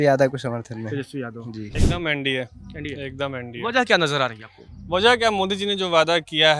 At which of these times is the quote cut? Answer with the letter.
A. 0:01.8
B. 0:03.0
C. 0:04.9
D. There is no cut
A